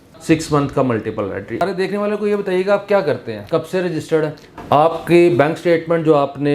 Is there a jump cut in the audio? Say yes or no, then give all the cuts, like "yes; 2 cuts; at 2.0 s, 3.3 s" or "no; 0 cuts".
yes; 3 cuts; at 1.6 s, 3.3 s, 4.5 s